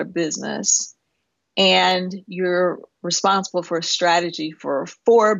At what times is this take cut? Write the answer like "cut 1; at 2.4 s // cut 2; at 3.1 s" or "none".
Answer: none